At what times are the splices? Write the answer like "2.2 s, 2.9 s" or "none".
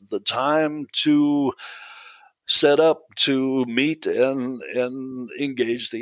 none